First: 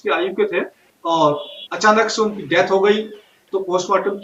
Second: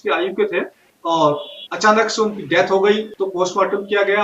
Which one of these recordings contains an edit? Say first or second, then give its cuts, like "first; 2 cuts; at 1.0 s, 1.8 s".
second; 1 cut; at 3.1 s